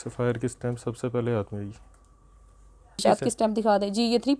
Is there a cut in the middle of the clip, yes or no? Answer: yes